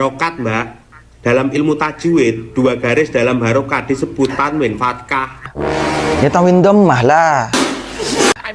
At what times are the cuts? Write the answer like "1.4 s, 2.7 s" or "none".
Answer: 5.5 s